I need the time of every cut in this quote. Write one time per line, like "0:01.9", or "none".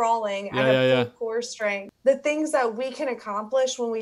0:01.9